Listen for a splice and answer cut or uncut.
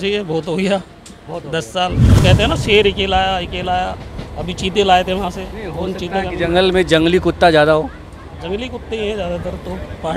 cut